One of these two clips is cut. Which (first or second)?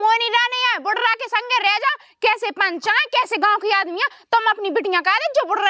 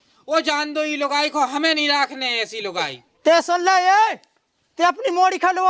second